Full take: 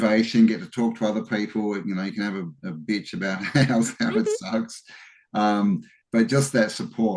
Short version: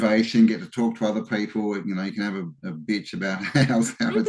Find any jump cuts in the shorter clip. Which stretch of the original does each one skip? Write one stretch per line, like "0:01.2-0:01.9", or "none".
none